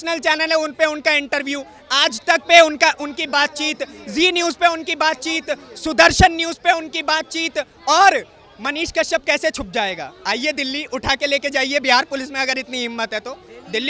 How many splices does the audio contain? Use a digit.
0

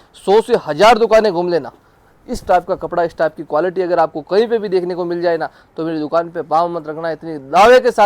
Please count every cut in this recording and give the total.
0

